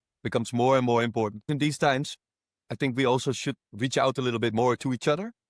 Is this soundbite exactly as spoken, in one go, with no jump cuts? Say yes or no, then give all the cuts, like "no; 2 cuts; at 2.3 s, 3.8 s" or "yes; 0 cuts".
no; 1 cut; at 1.5 s